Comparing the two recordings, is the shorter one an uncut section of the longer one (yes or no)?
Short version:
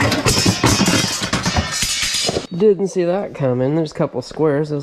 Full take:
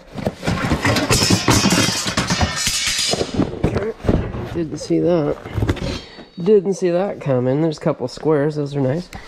no